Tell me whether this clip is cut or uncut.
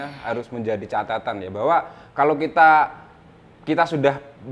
uncut